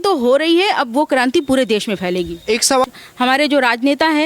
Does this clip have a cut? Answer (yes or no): yes